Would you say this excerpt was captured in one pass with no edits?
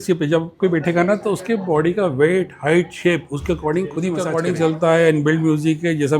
no; 1 cut; at 4.3 s

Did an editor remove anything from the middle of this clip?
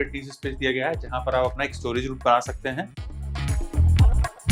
yes; 1 cut; at 3.1 s

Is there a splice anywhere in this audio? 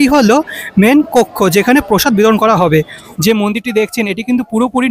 yes; 1 cut; at 3.0 s

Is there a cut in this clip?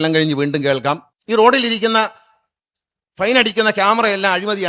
yes; 1 cut; at 1.1 s

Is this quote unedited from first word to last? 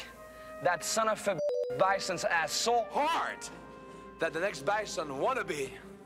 yes; 0 cuts

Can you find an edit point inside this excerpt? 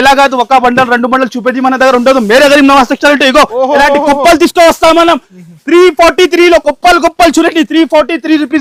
no; 0 cuts

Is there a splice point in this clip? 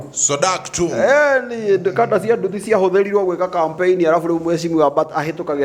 no; 0 cuts

